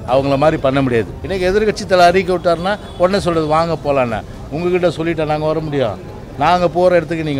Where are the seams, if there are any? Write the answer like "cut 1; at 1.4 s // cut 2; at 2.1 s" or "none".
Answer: cut 1; at 1.2 s